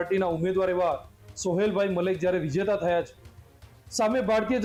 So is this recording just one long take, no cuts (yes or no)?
yes